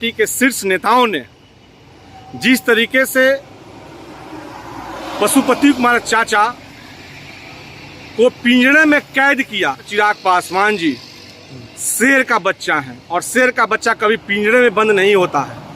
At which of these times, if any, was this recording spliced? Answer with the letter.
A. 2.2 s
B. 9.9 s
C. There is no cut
B